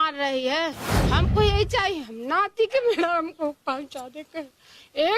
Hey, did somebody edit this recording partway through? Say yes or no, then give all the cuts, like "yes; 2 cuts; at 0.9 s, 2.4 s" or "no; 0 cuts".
yes; 1 cut; at 0.9 s